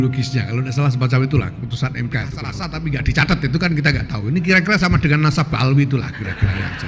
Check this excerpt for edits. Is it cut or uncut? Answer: cut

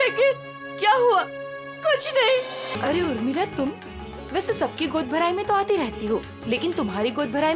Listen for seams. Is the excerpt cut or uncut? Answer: cut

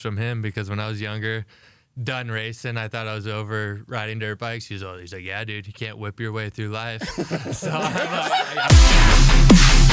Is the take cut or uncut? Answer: cut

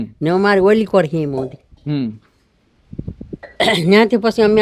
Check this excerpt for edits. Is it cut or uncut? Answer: uncut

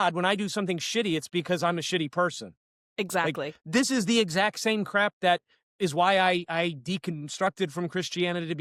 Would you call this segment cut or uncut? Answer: uncut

